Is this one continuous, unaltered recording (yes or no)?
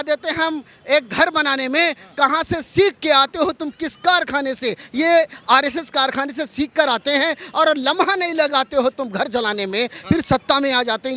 yes